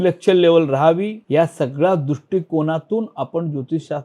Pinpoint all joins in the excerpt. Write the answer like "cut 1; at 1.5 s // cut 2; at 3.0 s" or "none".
cut 1; at 1.2 s